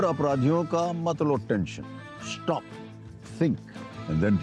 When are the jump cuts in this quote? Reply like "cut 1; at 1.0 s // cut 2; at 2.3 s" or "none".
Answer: none